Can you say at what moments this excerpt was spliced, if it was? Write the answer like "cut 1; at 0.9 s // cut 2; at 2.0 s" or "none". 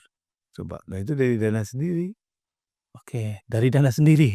none